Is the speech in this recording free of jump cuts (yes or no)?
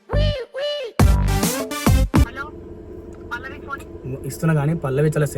no